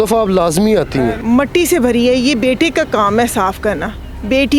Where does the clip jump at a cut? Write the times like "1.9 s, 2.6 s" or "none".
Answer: 1.2 s